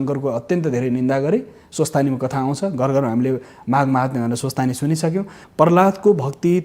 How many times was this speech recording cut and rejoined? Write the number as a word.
one